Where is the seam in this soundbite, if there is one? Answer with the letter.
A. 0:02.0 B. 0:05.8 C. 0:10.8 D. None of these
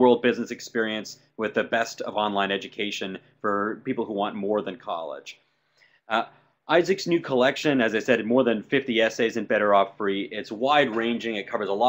A